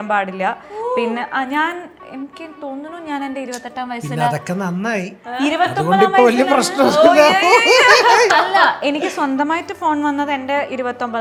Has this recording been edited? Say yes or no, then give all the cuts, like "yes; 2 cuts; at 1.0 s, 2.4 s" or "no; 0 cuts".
no; 0 cuts